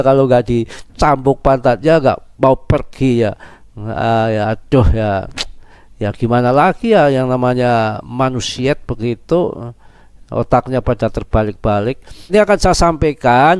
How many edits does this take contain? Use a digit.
1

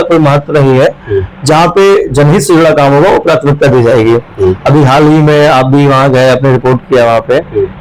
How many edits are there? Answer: 0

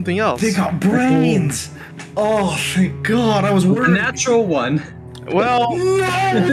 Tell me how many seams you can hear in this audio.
0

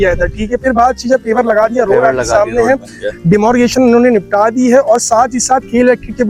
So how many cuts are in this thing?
0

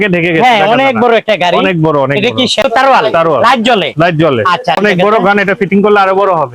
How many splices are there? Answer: 2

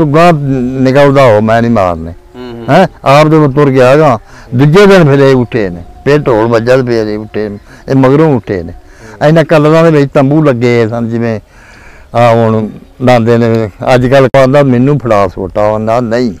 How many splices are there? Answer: 1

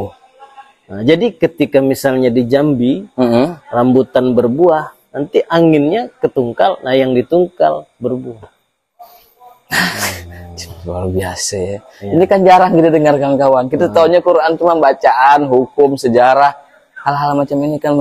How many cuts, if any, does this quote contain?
0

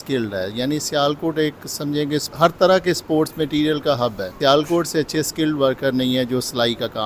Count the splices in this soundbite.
2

